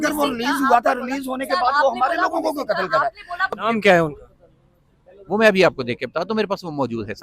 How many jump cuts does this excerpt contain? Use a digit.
1